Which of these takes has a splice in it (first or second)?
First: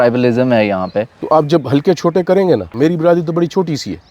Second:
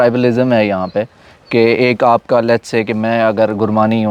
first